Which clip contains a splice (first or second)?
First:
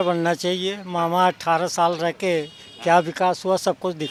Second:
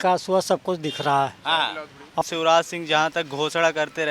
second